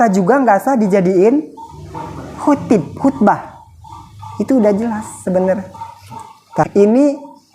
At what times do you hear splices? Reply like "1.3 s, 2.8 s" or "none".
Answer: 6.6 s